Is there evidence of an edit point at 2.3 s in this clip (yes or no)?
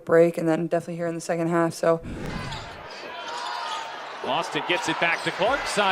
yes